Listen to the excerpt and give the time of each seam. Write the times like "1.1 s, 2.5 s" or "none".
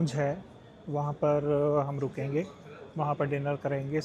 none